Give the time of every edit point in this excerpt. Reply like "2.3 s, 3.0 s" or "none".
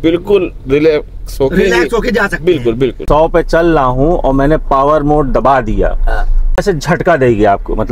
3.0 s, 6.6 s